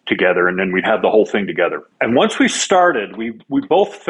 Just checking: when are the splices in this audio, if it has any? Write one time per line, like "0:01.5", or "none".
0:01.9